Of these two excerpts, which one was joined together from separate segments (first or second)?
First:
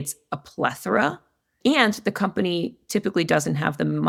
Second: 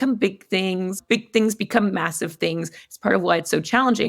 second